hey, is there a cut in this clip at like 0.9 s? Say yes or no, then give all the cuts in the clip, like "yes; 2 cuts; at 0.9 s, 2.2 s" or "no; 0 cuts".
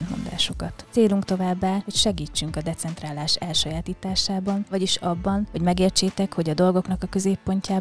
no; 0 cuts